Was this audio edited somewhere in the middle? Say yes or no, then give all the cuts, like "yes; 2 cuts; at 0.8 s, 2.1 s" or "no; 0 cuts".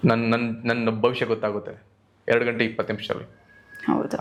no; 0 cuts